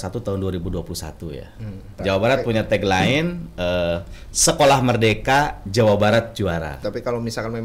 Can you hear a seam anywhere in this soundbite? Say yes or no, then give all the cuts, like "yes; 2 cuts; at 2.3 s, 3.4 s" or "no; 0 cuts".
yes; 2 cuts; at 2.0 s, 6.8 s